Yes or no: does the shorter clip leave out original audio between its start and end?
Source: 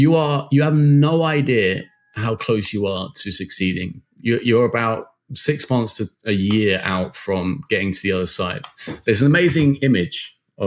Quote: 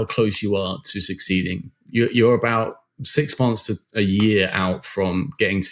no